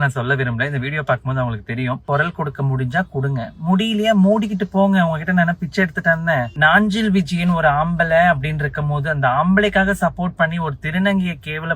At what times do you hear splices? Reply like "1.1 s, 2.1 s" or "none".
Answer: 2.0 s, 6.5 s